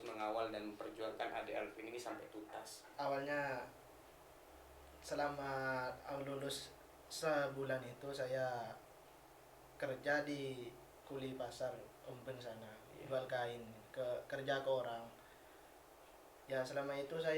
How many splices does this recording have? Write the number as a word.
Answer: one